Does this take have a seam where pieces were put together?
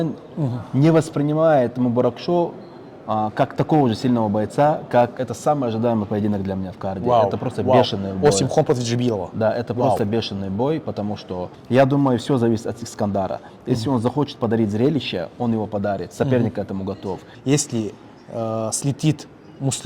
yes; 3 cuts; at 5.1 s, 11.5 s, 17.3 s

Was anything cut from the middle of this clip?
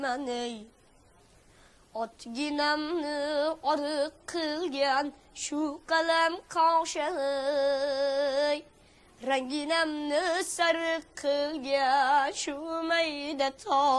no; 0 cuts

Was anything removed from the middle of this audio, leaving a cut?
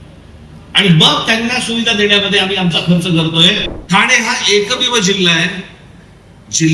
yes; 1 cut; at 3.7 s

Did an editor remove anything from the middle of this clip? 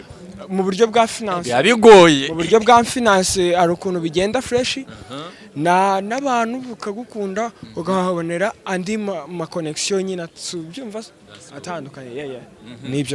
no; 0 cuts

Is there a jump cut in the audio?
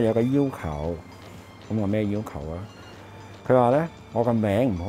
no; 0 cuts

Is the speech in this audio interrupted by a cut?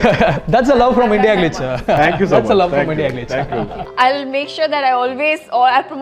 yes; 1 cut; at 3.8 s

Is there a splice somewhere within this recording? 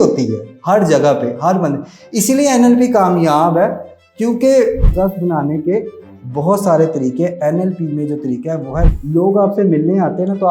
yes; 2 cuts; at 4.9 s, 8.9 s

